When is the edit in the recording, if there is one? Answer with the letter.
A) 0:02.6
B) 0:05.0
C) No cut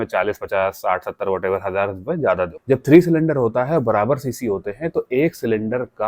A